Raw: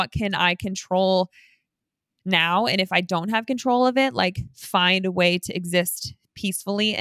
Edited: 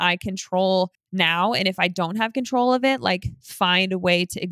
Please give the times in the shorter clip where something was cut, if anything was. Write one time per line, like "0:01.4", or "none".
0:01.0